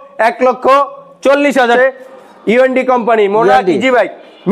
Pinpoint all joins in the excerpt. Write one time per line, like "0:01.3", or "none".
0:01.6